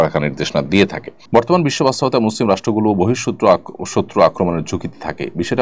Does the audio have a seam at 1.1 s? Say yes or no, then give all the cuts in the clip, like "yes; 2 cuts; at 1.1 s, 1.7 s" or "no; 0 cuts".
yes; 1 cut; at 1.1 s